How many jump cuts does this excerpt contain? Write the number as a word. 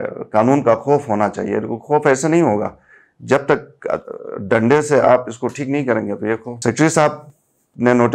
one